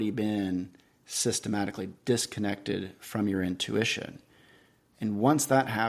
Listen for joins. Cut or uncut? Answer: uncut